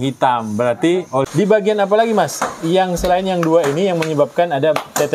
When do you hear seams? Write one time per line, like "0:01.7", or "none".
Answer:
0:01.2

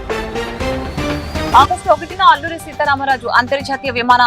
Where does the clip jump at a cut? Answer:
0:01.5

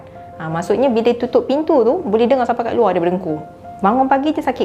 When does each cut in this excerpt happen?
0:03.6

